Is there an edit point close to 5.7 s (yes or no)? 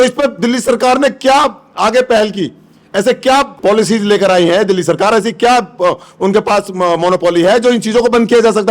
no